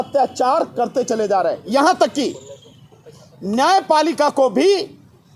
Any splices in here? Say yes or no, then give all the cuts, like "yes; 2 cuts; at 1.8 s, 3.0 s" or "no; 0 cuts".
no; 0 cuts